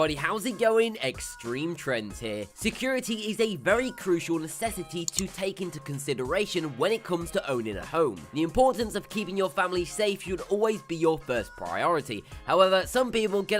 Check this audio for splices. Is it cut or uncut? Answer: uncut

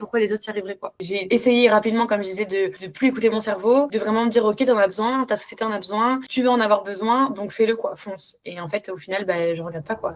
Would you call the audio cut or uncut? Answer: cut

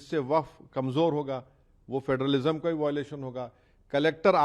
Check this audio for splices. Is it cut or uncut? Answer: uncut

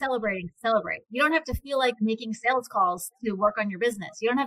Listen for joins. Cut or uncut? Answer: uncut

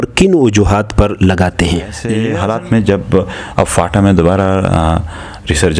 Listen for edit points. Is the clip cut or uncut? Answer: cut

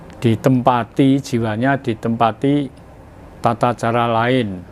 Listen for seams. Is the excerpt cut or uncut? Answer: uncut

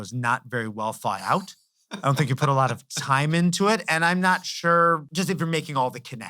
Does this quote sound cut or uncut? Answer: cut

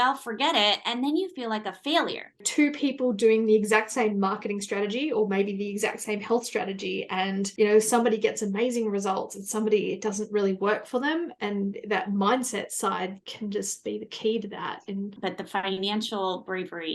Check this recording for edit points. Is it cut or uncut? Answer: cut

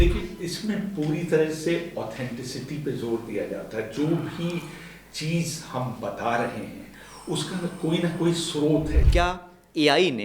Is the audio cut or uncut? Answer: cut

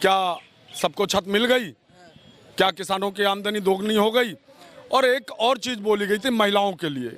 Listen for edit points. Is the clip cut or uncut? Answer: uncut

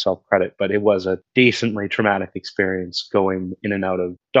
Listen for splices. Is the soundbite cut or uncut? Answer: cut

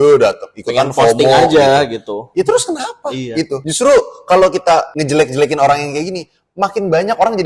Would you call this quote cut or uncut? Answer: cut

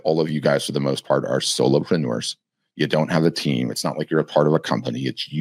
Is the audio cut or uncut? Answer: uncut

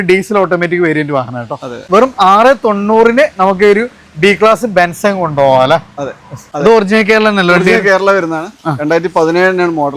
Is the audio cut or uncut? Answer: cut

